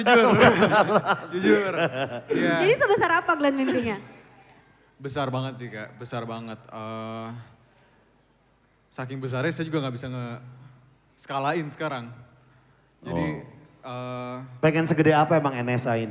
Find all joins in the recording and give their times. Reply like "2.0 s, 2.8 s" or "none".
none